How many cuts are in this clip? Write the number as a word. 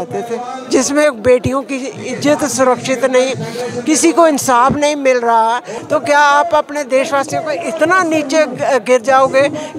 one